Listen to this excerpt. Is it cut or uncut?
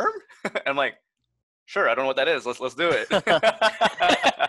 uncut